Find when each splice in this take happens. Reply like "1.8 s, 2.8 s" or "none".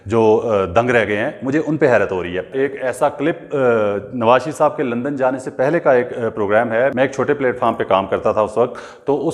2.5 s